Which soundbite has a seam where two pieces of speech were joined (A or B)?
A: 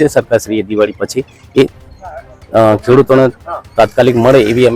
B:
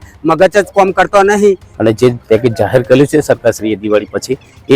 B